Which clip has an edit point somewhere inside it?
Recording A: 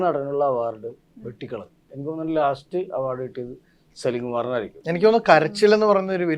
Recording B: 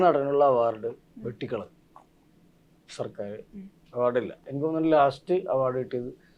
A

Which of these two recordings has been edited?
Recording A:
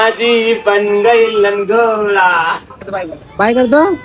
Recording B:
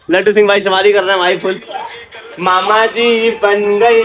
A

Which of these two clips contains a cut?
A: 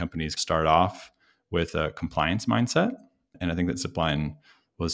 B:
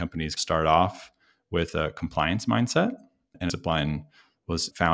B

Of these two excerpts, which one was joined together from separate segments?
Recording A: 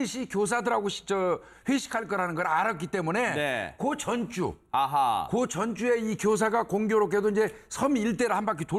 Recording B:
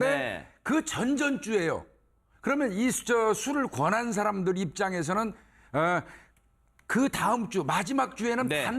B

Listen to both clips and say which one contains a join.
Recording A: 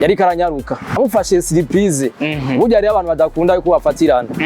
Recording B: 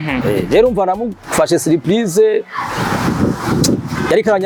A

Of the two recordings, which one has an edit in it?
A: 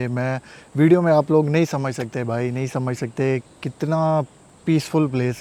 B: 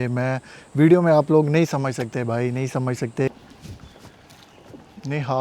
B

